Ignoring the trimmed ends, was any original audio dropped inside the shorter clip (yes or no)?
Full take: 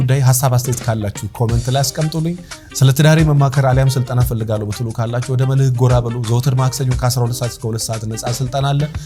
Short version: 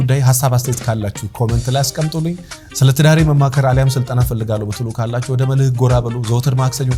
no